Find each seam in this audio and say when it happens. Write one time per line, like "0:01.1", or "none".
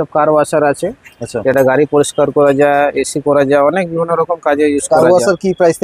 none

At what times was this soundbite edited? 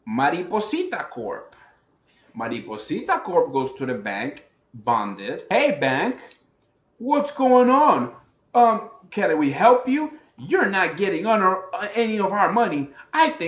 0:05.4

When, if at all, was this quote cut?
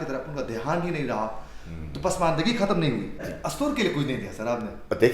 0:03.3

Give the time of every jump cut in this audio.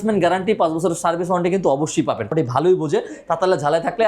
0:02.3

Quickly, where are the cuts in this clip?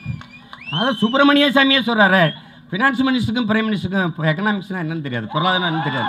none

